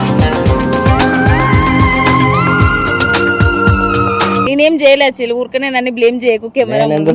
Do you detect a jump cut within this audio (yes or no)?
yes